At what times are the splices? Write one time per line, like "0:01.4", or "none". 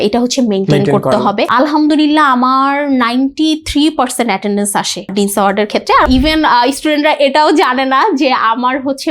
0:01.5
0:05.1
0:06.1